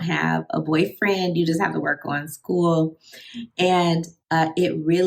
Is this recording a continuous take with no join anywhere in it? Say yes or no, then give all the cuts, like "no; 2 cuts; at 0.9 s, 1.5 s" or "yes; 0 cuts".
no; 1 cut; at 4.1 s